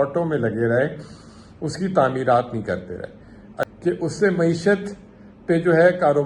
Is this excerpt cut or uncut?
cut